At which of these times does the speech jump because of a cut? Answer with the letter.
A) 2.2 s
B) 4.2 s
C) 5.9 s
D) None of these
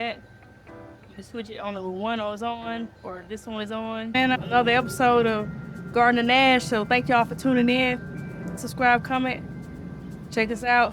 B